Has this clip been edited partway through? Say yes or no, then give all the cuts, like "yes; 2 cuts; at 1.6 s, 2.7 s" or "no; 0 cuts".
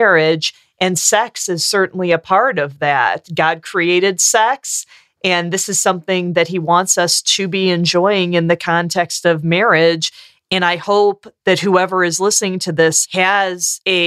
no; 0 cuts